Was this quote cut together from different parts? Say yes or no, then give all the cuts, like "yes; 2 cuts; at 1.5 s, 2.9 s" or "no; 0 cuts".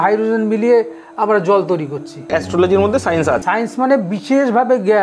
yes; 2 cuts; at 2.3 s, 3.4 s